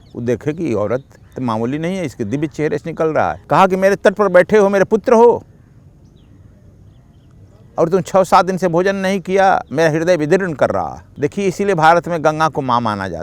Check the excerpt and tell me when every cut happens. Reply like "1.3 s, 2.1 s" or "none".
3.4 s, 11.0 s